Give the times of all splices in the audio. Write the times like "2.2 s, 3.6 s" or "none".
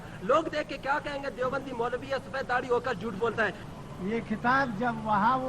3.6 s

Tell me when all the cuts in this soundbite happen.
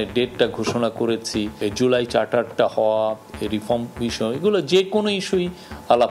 1.5 s

